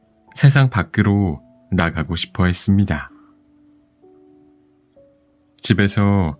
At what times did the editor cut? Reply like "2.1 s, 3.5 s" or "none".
3.1 s, 5.1 s